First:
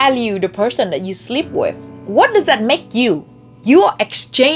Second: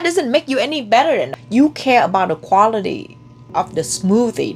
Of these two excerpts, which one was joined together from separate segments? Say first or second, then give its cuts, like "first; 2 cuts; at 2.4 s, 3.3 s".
second; 1 cut; at 1.4 s